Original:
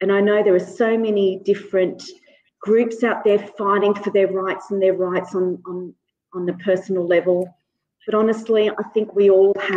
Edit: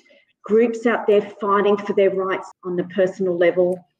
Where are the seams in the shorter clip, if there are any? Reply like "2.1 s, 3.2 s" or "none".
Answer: 2.4 s